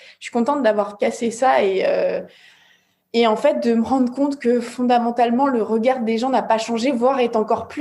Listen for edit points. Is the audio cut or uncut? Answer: uncut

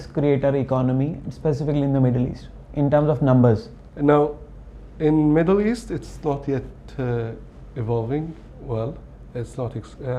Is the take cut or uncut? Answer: uncut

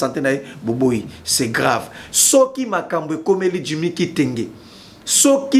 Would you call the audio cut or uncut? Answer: uncut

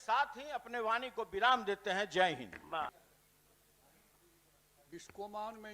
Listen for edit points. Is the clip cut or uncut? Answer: cut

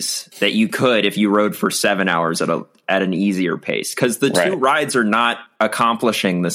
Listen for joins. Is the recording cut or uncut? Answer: cut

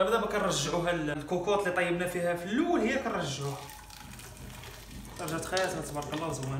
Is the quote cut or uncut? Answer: cut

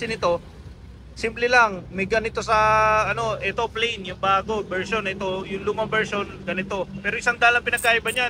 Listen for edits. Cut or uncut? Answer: uncut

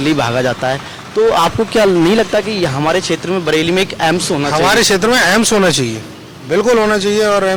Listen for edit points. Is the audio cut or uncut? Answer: uncut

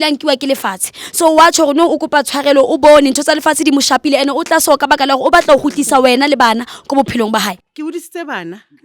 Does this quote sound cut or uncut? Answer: cut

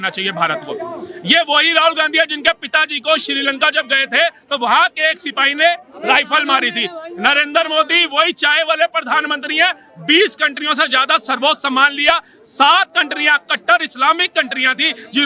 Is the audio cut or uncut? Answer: uncut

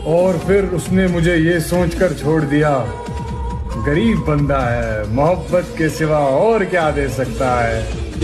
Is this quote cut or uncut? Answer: uncut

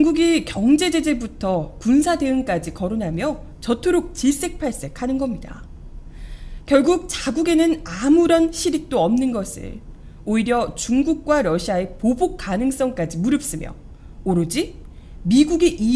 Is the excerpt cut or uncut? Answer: uncut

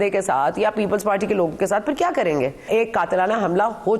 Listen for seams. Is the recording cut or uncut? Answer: cut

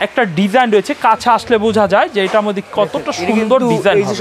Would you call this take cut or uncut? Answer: uncut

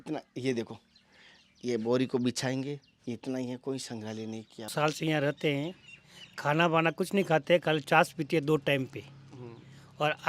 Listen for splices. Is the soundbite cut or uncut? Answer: cut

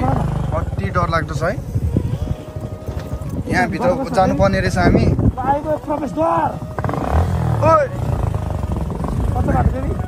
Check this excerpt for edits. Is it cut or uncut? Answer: uncut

